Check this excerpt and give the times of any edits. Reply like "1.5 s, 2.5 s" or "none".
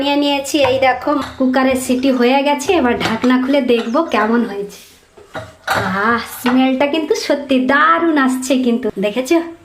1.2 s, 8.9 s